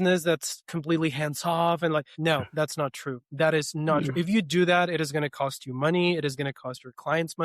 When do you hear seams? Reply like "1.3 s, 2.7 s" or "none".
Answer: 2.1 s

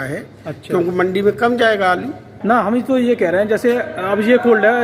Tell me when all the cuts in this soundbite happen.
2.3 s

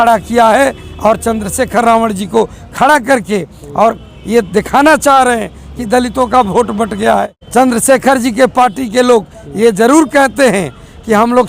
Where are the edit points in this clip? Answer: 7.4 s

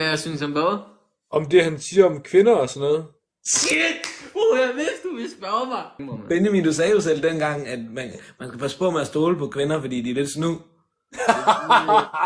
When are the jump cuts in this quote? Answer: none

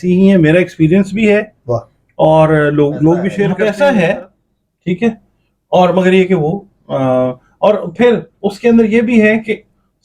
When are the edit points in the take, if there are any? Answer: 3.5 s

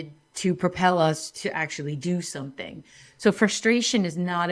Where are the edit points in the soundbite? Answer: none

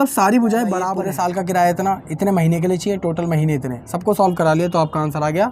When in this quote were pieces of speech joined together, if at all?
0.9 s

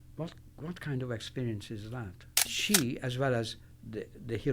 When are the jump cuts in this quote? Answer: 2.5 s

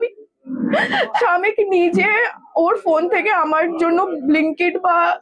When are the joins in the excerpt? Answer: 1.2 s

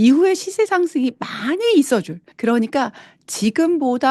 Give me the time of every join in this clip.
2.2 s

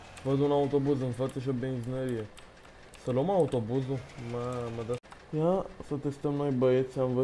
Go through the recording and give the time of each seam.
5.0 s

